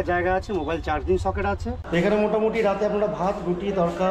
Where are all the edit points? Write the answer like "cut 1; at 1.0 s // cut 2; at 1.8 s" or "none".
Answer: cut 1; at 1.7 s